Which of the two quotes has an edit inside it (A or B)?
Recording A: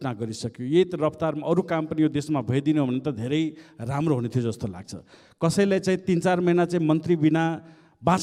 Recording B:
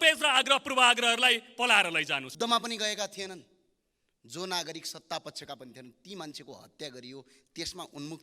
B